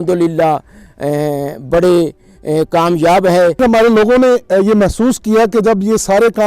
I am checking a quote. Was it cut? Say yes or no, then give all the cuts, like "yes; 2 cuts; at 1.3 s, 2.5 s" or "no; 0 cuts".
yes; 1 cut; at 3.6 s